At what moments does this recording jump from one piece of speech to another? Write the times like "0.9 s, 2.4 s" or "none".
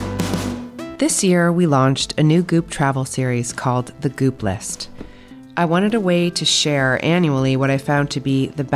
0.9 s